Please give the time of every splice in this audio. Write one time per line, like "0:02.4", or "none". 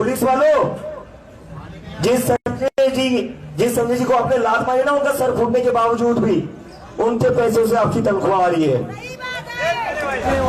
none